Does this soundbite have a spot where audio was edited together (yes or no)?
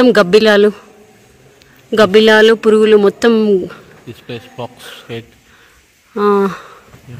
no